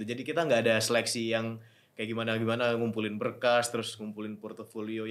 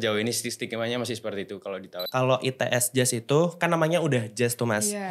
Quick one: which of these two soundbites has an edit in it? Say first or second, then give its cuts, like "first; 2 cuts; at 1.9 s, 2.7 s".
second; 1 cut; at 2.0 s